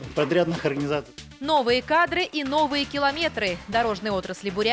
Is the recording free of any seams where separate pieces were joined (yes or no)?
no